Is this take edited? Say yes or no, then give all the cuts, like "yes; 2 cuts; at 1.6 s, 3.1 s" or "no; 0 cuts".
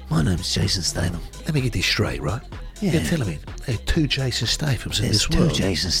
yes; 1 cut; at 1.3 s